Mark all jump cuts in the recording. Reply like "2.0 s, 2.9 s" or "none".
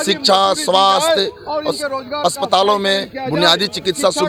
none